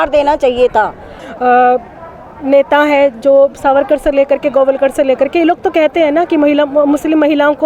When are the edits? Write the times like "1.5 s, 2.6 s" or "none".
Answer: 1.2 s